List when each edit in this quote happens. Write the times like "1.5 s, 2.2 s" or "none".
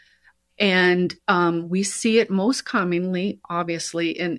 none